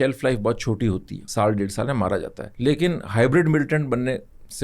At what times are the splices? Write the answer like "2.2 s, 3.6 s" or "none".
1.2 s, 2.4 s